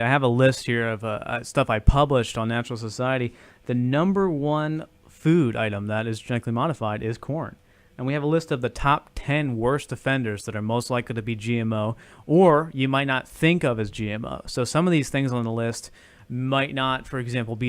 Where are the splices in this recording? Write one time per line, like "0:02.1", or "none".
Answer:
0:13.5

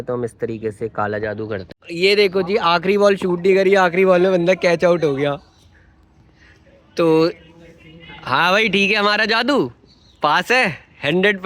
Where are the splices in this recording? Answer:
0:01.7

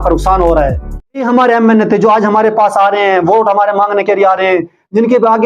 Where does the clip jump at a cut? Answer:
0:01.2

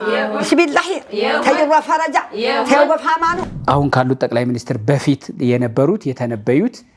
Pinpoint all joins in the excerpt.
0:03.5

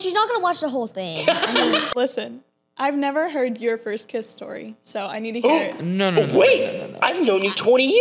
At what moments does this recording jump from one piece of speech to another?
0:01.9

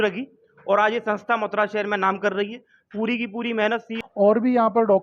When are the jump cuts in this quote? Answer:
0:03.9

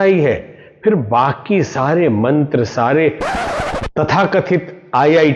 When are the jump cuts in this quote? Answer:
0:03.5

